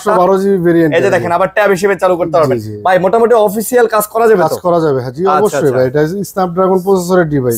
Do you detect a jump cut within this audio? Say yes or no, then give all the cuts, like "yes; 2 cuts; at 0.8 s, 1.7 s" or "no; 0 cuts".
no; 0 cuts